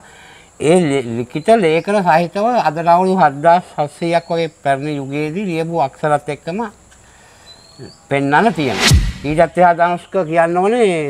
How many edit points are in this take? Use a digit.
1